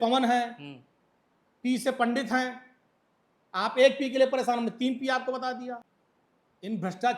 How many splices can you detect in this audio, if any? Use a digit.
1